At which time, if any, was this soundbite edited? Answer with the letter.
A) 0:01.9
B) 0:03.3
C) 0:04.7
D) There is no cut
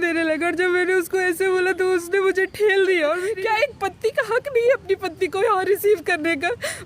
B